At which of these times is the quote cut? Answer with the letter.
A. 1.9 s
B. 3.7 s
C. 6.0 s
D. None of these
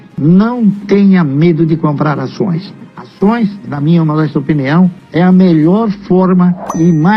B